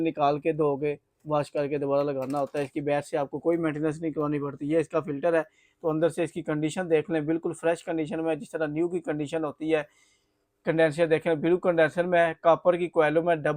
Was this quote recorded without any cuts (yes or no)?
yes